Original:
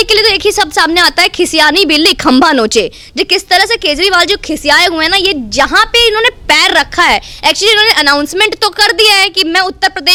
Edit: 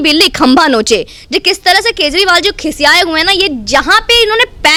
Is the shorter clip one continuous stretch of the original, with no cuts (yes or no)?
yes